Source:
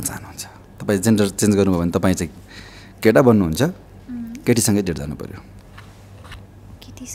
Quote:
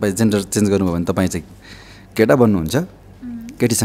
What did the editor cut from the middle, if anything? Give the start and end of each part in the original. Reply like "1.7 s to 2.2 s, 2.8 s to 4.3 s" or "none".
none